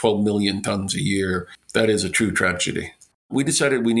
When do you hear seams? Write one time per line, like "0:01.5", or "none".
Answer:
0:03.1